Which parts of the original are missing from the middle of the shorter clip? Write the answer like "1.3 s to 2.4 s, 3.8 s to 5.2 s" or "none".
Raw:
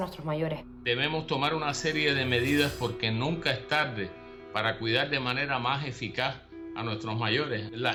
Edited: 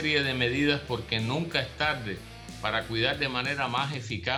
none